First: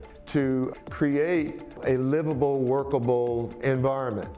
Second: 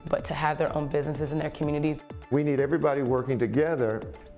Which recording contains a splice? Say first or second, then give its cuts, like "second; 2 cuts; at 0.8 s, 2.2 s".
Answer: second; 1 cut; at 2.2 s